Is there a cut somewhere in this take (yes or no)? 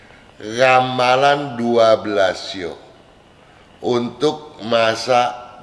no